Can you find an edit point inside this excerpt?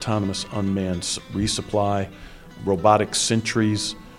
yes; 1 cut; at 2.5 s

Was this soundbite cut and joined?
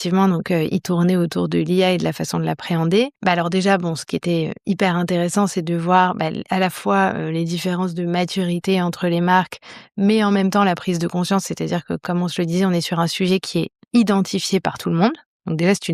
yes; 1 cut; at 3.2 s

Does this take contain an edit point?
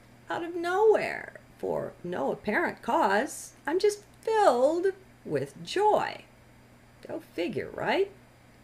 yes; 1 cut; at 7.7 s

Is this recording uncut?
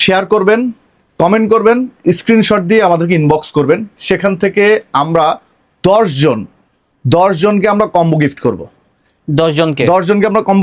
yes; 0 cuts

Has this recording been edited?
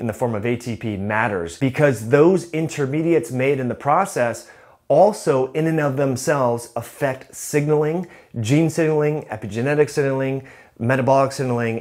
yes; 1 cut; at 1.5 s

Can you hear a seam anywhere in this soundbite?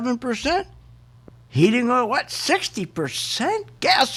no; 0 cuts

